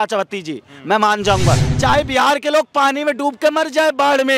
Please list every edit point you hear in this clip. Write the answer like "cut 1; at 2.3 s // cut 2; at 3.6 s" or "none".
cut 1; at 1.7 s